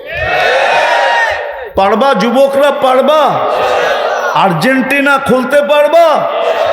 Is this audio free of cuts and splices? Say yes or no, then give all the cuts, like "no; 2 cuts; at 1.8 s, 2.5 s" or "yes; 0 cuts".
no; 1 cut; at 1.6 s